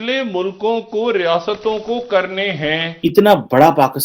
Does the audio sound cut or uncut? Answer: cut